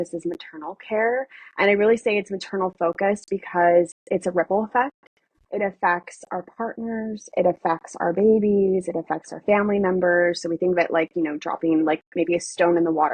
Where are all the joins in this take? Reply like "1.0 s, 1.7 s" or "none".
none

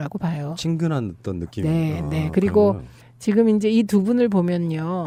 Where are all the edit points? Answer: none

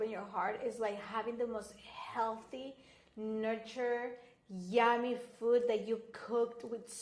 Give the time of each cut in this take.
none

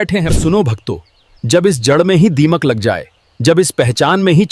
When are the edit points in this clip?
none

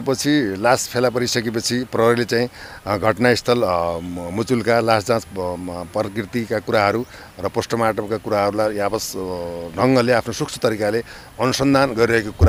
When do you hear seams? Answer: none

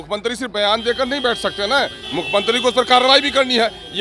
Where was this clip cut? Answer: none

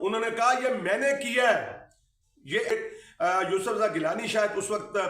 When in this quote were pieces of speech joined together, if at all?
2.7 s

